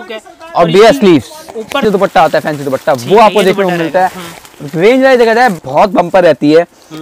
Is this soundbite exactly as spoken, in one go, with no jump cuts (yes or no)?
no